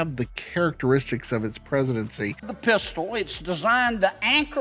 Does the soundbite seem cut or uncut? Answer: cut